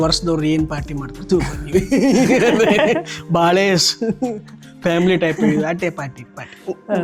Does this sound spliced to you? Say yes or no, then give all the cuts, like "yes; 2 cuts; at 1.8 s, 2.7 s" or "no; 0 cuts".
no; 0 cuts